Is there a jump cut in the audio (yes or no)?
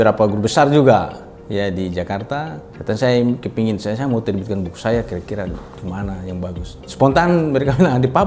yes